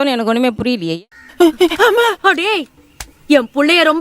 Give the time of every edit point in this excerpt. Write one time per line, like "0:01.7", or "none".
none

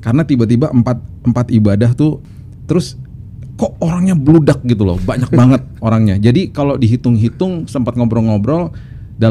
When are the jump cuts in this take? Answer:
0:02.3

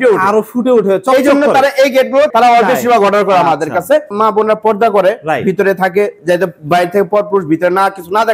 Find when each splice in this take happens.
0:02.3
0:03.9

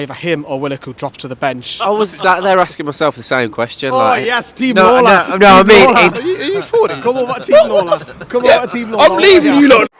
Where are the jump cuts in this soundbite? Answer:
0:01.7
0:06.2

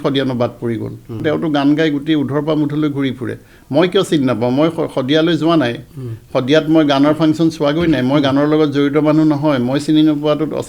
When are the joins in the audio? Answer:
0:01.2

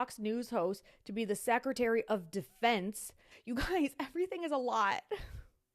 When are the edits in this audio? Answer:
0:03.3

